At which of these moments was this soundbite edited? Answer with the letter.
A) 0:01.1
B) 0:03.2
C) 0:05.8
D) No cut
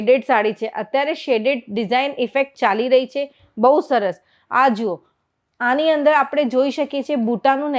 D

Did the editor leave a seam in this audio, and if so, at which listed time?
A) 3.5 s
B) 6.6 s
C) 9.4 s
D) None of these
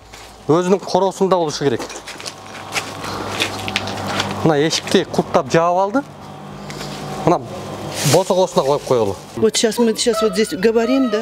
C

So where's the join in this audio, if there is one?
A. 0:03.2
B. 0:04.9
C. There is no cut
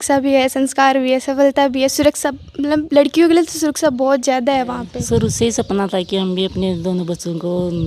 B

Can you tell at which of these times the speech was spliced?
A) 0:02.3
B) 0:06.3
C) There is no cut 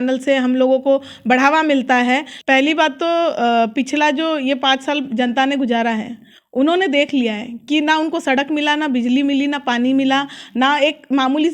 A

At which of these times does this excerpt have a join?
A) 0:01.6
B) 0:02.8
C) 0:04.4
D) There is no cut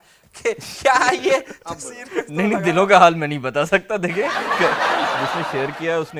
D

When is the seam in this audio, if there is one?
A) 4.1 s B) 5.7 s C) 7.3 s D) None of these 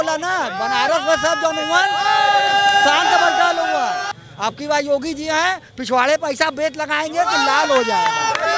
A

